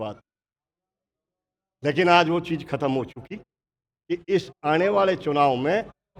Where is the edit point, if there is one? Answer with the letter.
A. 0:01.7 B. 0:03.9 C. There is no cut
B